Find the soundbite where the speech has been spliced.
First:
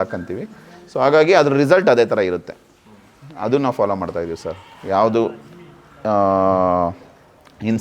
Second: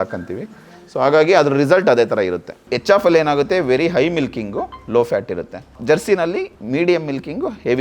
second; 3 cuts; at 2.7 s, 5.7 s, 6.6 s

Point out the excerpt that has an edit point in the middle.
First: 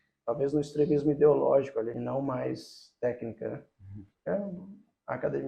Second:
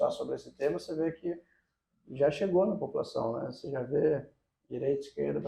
first; 1 cut; at 1.9 s

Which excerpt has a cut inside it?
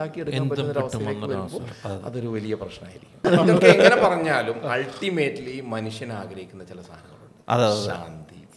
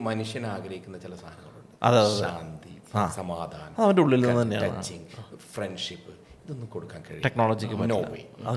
first; 1 cut; at 3.2 s

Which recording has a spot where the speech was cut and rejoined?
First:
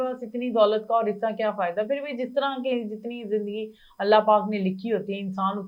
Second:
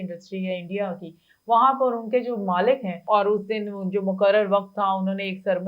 second; 1 cut; at 3.0 s

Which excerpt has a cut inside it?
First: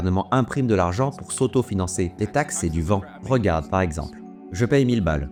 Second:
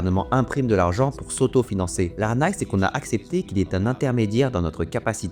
second; 1 cut; at 2.1 s

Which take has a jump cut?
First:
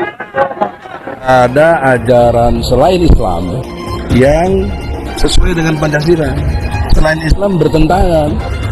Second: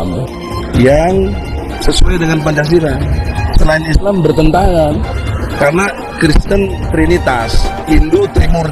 first; 1 cut; at 1.3 s

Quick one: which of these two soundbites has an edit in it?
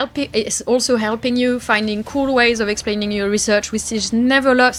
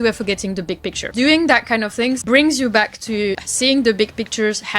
second; 3 cuts; at 1.0 s, 2.2 s, 3.5 s

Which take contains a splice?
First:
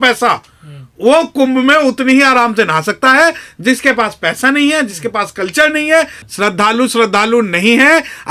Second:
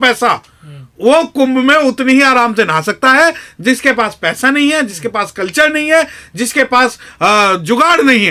first; 1 cut; at 6.2 s

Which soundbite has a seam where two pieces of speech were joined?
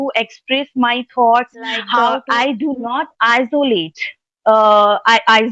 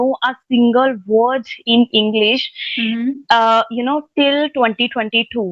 first; 1 cut; at 2.1 s

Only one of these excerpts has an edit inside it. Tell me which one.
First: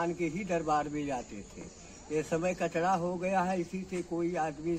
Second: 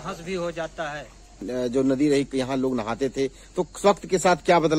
second; 1 cut; at 1.5 s

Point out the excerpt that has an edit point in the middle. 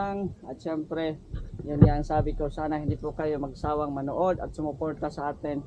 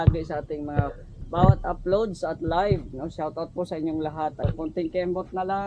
second; 1 cut; at 4.4 s

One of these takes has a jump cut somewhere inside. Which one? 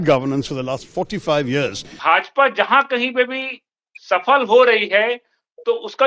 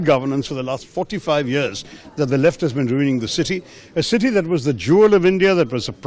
first; 1 cut; at 1.8 s

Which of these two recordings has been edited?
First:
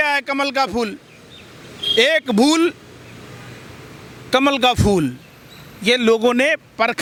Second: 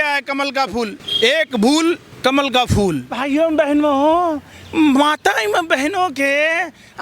second; 3 cuts; at 1.0 s, 2.1 s, 3.1 s

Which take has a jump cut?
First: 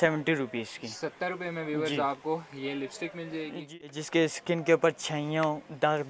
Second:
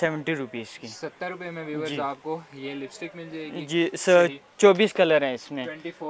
first; 1 cut; at 3.6 s

